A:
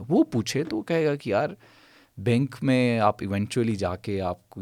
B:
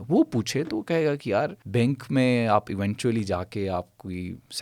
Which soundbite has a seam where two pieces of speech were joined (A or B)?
B